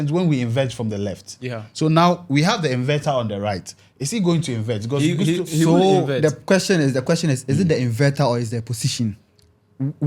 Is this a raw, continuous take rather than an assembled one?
yes; 0 cuts

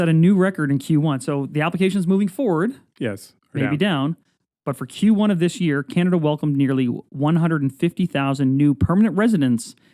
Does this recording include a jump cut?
no; 0 cuts

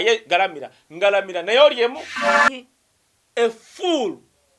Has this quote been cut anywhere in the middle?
yes; 1 cut; at 2.2 s

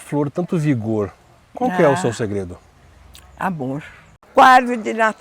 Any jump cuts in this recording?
yes; 1 cut; at 4.2 s

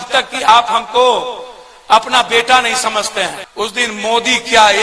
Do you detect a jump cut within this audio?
yes; 1 cut; at 3.4 s

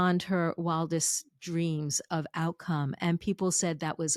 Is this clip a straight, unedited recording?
yes; 0 cuts

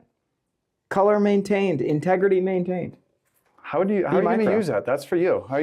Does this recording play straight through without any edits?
yes; 0 cuts

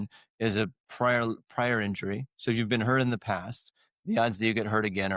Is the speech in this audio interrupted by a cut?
no; 0 cuts

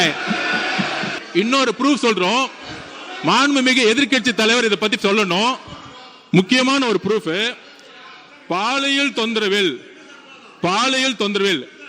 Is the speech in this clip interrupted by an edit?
yes; 1 cut; at 1.1 s

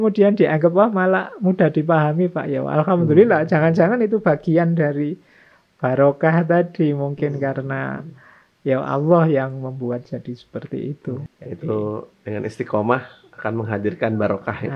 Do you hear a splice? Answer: yes; 1 cut; at 11.3 s

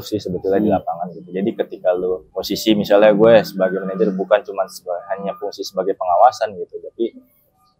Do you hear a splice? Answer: yes; 1 cut; at 2.3 s

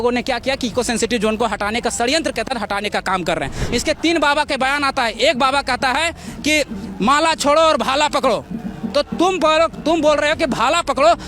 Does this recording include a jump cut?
yes; 1 cut; at 3.6 s

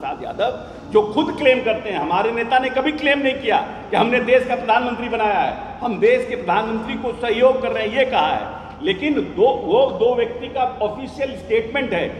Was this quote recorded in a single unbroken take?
yes; 0 cuts

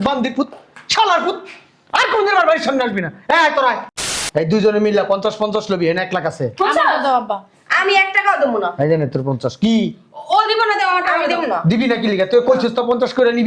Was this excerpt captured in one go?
no; 1 cut; at 4.2 s

